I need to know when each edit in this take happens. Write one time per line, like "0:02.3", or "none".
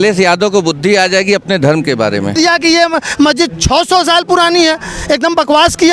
0:02.3